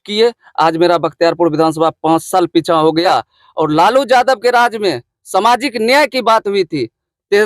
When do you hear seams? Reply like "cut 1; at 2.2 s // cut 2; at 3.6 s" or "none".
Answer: cut 1; at 3.1 s